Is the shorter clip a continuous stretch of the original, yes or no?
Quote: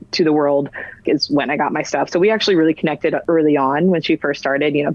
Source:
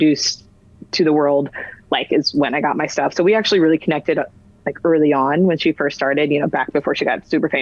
no